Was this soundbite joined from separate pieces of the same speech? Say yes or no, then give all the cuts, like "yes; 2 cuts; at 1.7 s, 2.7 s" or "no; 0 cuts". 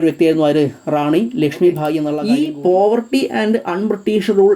yes; 1 cut; at 2.1 s